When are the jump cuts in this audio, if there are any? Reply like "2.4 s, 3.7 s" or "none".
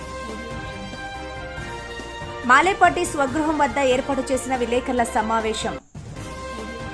1.2 s